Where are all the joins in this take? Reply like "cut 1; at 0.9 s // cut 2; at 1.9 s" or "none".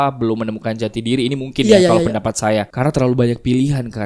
none